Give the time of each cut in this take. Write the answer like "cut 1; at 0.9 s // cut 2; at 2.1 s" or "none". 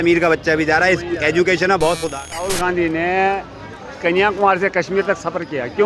cut 1; at 2.5 s